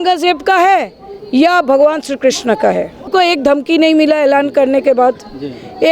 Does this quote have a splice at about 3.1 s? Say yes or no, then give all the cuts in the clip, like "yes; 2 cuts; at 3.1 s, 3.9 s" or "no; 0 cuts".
yes; 1 cut; at 3.1 s